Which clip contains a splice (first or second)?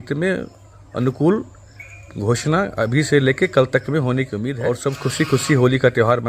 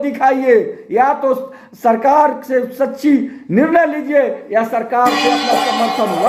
first